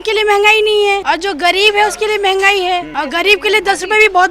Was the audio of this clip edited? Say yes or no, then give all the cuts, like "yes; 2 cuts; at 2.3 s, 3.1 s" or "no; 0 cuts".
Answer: yes; 2 cuts; at 1.0 s, 2.9 s